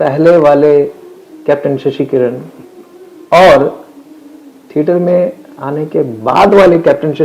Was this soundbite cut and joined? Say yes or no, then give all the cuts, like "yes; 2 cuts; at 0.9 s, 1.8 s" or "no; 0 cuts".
no; 0 cuts